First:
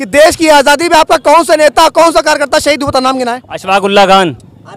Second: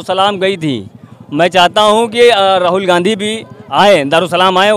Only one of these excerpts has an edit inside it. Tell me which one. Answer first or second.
first